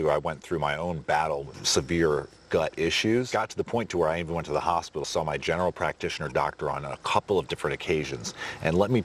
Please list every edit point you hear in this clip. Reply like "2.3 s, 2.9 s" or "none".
1.6 s, 3.3 s, 5.0 s